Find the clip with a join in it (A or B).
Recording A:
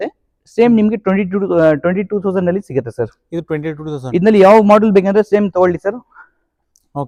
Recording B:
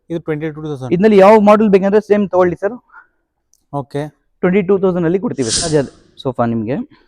B